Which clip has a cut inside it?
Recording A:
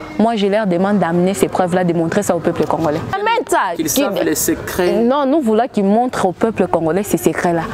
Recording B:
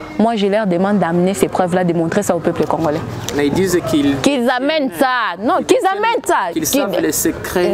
A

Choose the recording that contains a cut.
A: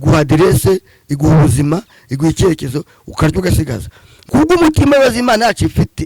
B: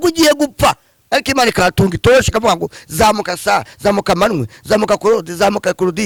A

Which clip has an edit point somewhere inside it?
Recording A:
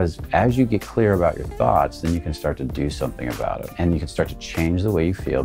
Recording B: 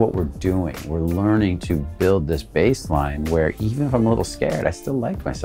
A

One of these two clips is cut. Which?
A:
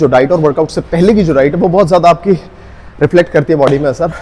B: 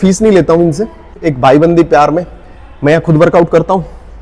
B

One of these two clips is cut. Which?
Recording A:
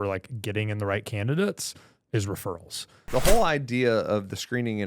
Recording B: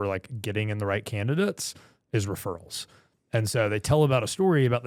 A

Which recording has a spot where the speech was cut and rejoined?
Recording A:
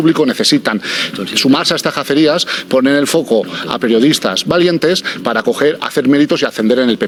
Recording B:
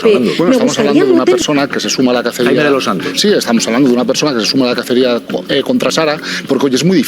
B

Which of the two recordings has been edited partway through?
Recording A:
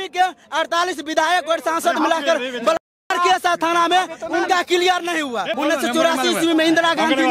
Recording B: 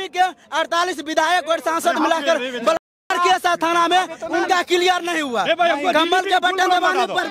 A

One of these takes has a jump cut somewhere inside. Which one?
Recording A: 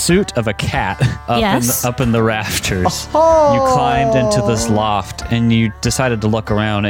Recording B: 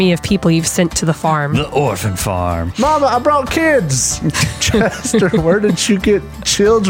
A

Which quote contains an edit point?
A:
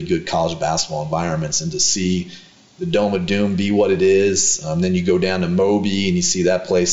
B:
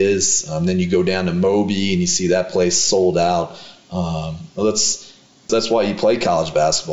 B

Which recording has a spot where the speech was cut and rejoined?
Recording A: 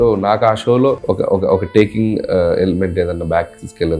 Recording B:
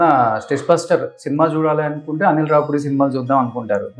A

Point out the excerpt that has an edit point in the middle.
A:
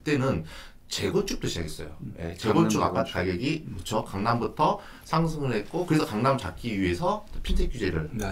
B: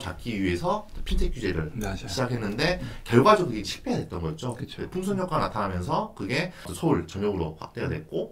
B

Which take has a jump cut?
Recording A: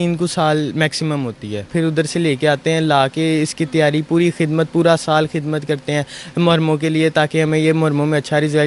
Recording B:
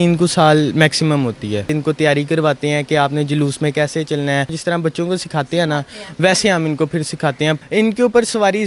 B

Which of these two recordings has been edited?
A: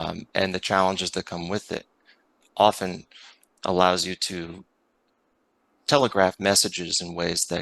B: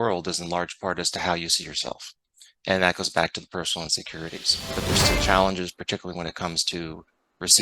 B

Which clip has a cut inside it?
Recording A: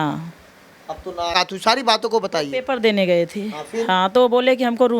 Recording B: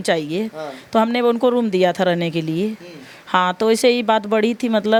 A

